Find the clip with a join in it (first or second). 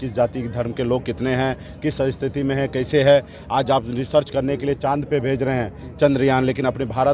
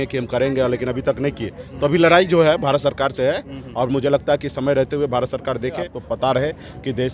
second